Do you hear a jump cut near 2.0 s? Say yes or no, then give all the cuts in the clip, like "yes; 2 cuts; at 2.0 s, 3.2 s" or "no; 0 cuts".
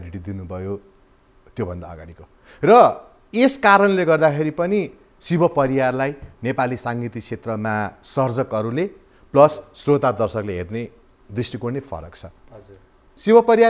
no; 0 cuts